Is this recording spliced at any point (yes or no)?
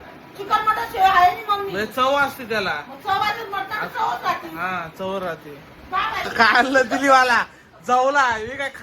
yes